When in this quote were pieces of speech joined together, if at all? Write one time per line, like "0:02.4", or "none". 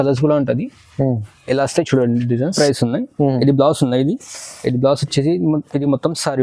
0:02.5

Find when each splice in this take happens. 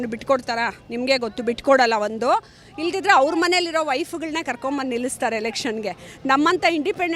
none

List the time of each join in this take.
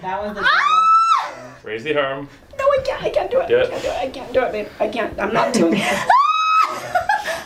none

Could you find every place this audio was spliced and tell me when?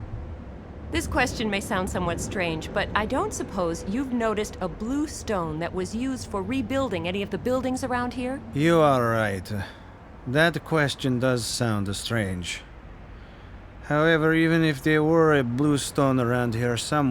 0:00.9

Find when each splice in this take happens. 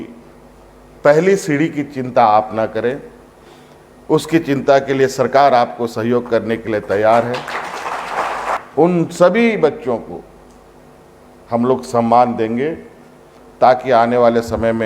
0:08.6

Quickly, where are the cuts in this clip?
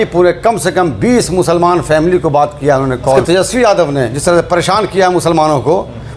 0:03.2

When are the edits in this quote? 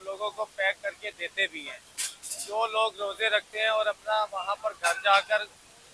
none

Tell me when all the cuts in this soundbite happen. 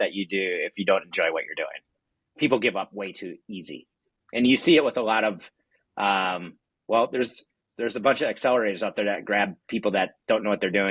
none

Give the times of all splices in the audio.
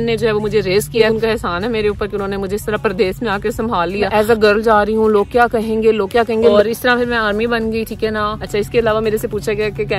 0:01.1
0:04.1
0:06.4
0:08.4

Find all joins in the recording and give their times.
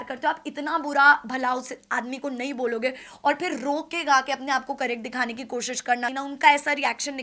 0:06.1

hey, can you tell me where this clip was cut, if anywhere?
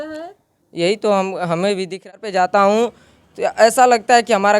0:02.1

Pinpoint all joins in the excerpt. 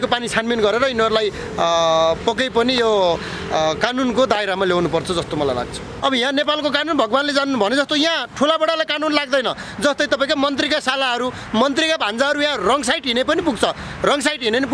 0:05.9

